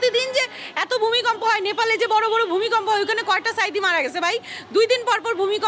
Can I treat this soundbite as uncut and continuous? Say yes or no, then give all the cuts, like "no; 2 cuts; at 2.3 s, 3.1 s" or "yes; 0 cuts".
yes; 0 cuts